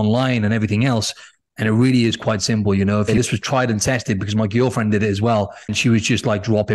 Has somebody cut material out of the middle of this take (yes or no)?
yes